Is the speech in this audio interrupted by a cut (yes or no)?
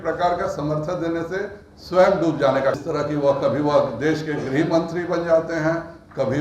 yes